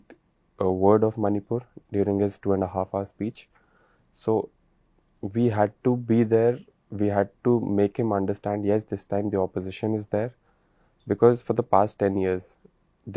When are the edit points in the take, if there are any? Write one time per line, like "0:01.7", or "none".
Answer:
none